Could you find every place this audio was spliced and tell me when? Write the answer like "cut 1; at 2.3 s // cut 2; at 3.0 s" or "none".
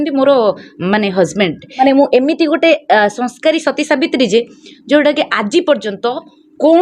cut 1; at 1.8 s